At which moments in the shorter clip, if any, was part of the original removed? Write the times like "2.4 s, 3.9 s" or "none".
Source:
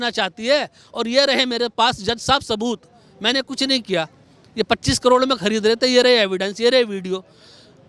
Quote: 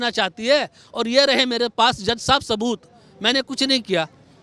none